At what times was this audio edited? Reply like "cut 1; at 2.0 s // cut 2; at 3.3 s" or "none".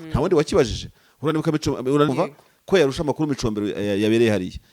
cut 1; at 2.1 s